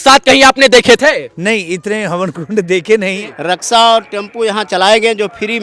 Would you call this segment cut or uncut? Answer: cut